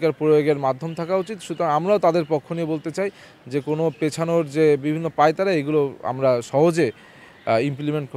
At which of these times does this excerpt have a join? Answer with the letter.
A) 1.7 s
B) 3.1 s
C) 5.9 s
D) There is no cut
D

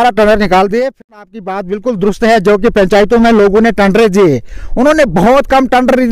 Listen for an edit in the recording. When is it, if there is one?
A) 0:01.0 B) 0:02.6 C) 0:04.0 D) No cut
A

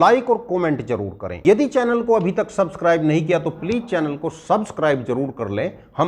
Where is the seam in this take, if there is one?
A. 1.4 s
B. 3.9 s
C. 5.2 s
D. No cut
A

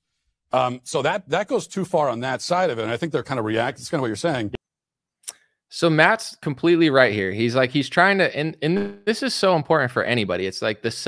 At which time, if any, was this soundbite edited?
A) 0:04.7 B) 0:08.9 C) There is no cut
C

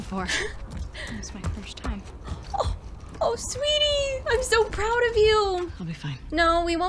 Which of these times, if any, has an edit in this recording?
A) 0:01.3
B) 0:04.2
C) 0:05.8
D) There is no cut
C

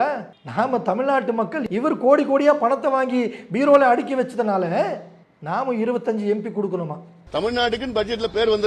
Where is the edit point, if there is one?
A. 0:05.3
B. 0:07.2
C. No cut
B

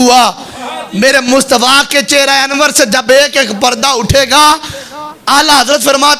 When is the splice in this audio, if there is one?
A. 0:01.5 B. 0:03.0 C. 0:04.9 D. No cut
D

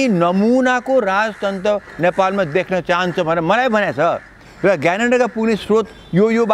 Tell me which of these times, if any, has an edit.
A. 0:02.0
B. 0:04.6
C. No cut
C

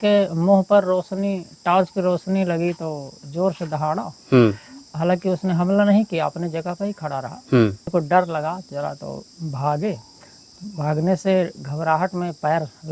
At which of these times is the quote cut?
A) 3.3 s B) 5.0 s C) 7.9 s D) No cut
C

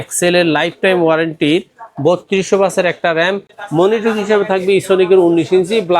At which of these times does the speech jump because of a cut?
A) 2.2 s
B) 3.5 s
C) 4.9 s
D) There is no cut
B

